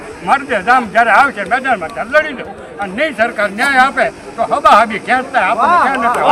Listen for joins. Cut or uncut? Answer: uncut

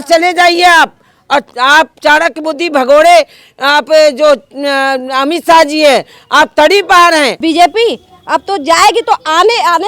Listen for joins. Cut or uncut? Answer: cut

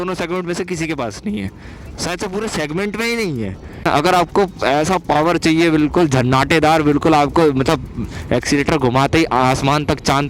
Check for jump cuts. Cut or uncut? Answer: cut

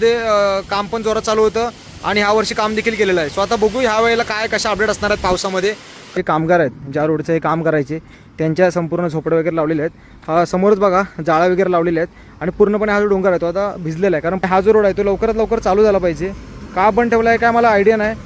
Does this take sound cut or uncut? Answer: cut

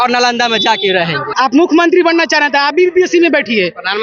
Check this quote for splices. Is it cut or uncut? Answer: cut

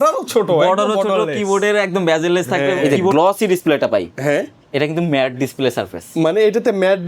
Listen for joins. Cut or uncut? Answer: cut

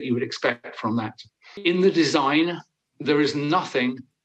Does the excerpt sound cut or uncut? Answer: cut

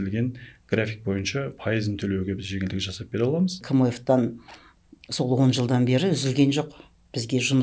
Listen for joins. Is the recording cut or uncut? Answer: cut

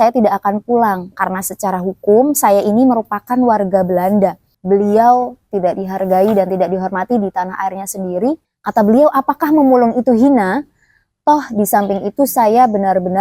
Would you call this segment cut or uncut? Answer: cut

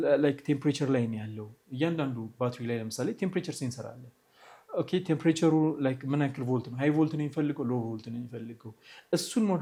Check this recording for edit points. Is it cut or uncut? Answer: uncut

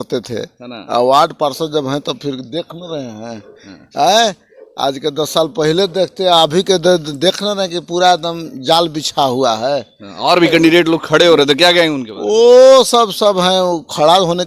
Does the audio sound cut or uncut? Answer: uncut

